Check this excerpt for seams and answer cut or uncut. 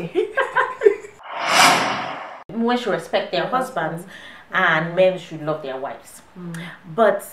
cut